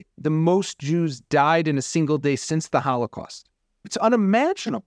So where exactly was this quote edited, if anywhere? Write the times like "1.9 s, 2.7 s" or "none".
3.9 s